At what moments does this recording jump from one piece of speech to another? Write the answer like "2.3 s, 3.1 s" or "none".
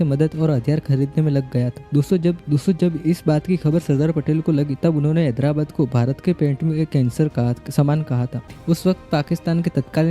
8.5 s

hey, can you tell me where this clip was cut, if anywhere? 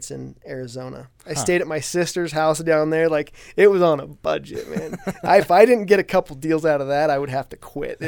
none

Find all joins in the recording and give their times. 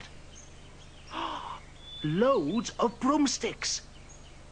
none

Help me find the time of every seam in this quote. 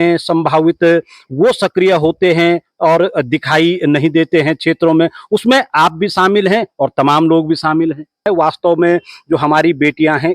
8.2 s

